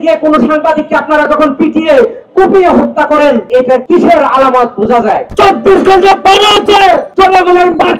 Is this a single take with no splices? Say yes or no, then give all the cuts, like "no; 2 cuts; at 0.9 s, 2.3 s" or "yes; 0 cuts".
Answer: no; 3 cuts; at 3.7 s, 5.3 s, 7.1 s